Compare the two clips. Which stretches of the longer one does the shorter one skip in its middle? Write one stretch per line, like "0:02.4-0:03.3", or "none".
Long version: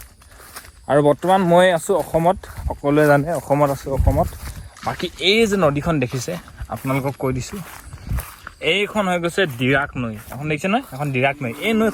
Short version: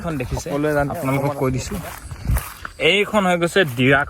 0:03.3-0:06.8